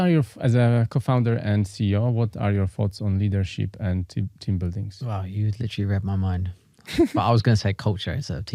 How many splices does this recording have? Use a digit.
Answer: 0